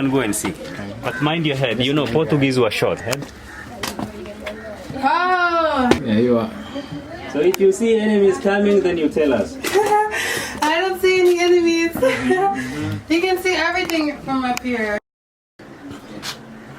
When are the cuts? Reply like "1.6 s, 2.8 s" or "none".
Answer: 3.4 s, 6.0 s, 15.6 s